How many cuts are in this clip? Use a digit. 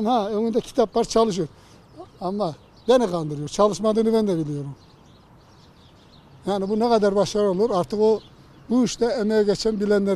0